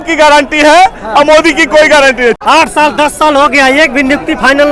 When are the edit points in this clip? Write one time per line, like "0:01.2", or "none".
0:02.4

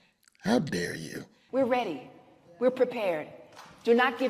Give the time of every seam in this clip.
0:01.3

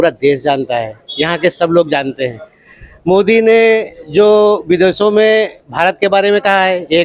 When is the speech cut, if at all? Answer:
none

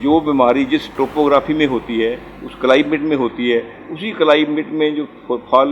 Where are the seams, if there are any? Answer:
0:00.9

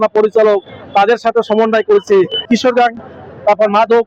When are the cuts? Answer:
0:02.5

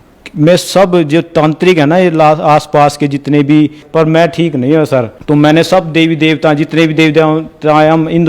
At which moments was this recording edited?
0:03.8
0:05.1

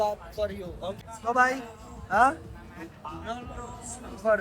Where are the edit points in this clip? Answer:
0:00.9

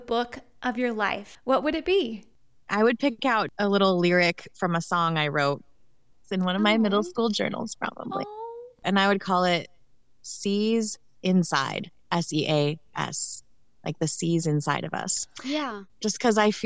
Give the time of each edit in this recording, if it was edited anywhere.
0:01.3
0:02.3
0:03.5
0:08.8
0:15.8

